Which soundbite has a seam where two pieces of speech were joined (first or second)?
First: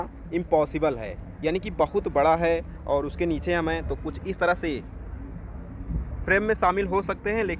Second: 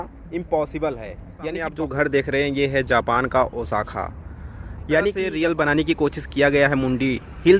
second